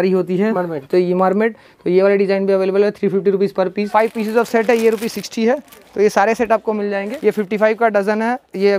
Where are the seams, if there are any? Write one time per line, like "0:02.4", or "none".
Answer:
0:03.8
0:07.1